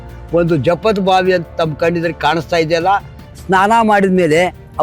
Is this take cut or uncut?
cut